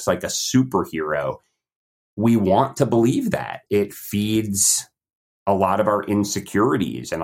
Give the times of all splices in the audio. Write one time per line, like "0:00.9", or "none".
0:03.5